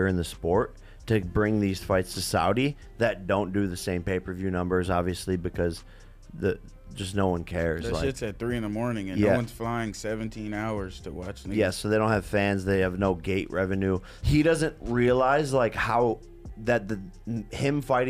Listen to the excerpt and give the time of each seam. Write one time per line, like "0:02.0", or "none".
0:14.1